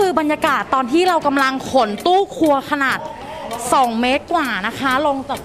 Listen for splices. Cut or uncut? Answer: uncut